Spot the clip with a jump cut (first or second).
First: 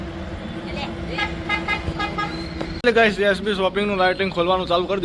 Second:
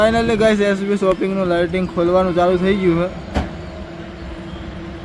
first